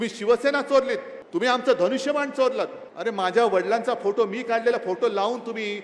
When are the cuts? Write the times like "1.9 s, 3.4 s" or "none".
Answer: 1.1 s, 2.8 s